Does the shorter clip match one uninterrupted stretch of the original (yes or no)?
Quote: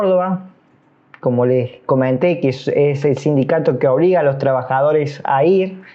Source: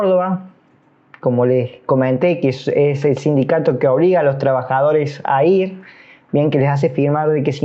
yes